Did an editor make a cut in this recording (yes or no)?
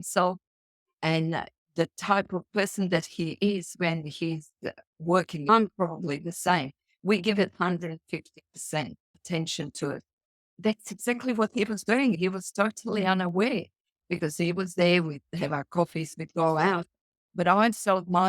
yes